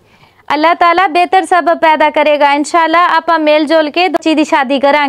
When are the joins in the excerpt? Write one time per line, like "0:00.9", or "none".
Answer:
0:04.2

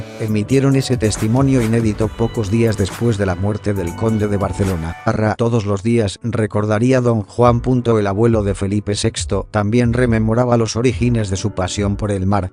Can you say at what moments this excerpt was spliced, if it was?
none

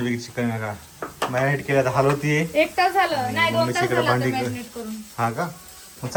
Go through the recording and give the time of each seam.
none

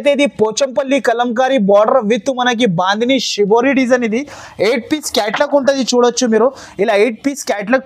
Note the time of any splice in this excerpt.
none

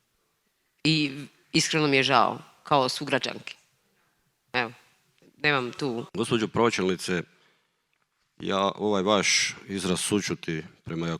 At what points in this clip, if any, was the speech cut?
0:06.1

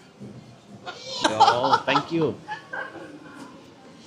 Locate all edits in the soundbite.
0:01.2

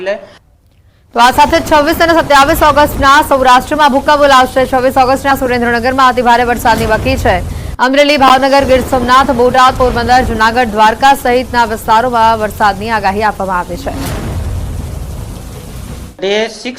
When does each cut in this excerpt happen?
0:04.7

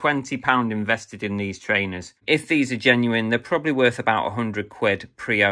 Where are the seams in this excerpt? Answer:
0:02.2

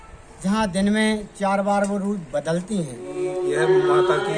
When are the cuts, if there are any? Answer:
0:03.3

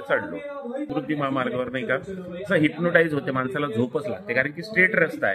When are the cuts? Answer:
0:00.9

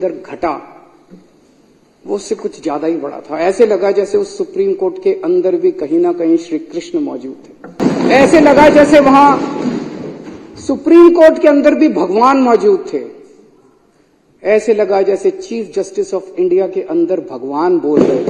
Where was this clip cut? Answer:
0:07.8

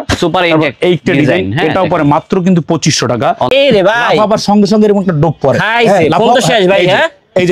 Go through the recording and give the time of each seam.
0:03.5

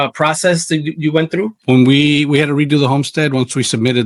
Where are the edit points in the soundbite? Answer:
none

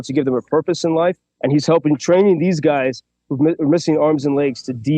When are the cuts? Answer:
0:01.3

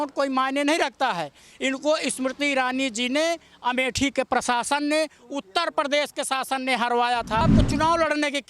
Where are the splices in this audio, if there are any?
0:07.4

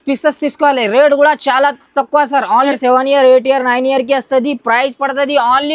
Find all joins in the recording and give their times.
0:02.7

